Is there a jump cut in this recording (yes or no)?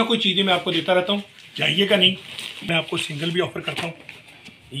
yes